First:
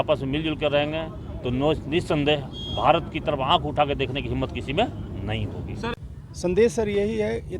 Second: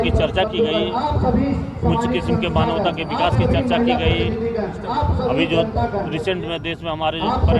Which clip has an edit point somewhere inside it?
first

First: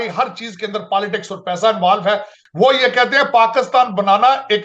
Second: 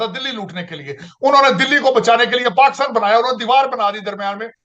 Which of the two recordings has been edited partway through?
first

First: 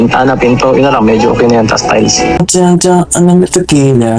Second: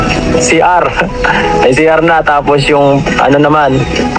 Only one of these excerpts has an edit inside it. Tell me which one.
first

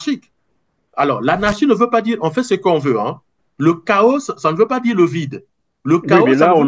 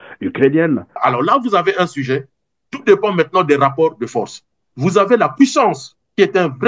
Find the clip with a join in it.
second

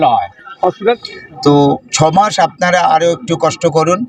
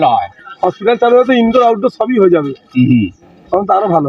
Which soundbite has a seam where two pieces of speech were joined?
first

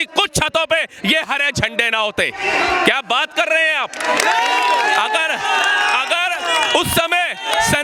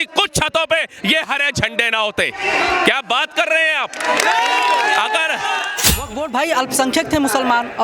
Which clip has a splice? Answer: second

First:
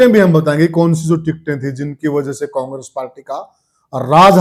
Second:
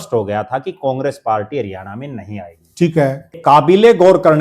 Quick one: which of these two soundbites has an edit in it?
second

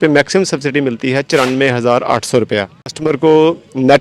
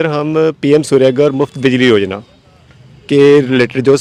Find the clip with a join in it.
first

